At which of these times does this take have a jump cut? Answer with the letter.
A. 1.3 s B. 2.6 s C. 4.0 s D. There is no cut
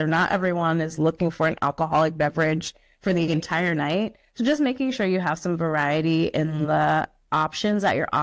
D